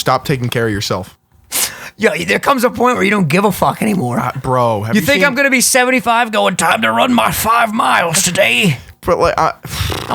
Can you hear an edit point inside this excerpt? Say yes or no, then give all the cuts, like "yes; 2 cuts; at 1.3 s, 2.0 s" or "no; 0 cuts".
no; 0 cuts